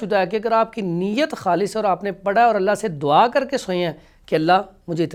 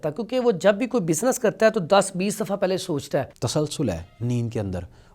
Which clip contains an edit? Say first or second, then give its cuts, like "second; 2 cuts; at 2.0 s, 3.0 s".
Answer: second; 1 cut; at 3.4 s